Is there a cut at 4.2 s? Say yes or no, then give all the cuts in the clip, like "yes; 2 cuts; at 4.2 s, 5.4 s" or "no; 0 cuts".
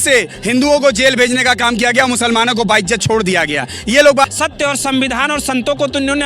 yes; 1 cut; at 4.2 s